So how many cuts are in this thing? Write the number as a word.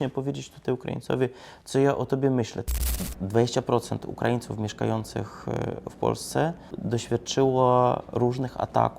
two